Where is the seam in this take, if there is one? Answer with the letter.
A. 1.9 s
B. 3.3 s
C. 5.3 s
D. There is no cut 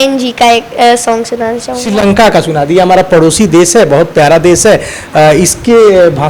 A